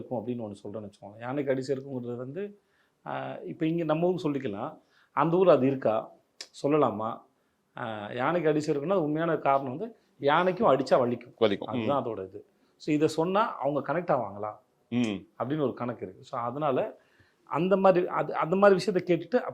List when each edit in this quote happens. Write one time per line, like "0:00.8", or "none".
none